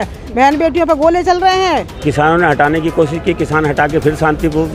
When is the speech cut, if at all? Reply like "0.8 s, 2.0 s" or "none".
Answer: 1.9 s